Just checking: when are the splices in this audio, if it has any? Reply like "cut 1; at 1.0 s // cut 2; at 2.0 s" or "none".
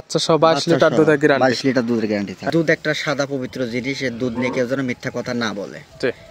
cut 1; at 2.5 s